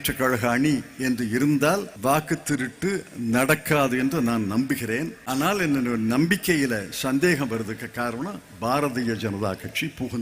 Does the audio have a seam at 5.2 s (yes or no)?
yes